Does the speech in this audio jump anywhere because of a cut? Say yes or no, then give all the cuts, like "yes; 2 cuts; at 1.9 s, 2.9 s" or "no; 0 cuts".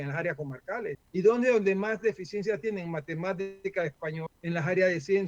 yes; 2 cuts; at 0.9 s, 4.3 s